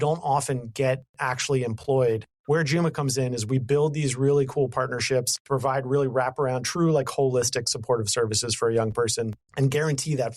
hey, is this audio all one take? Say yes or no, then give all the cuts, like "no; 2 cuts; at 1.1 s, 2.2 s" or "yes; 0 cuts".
no; 3 cuts; at 2.3 s, 5.4 s, 9.4 s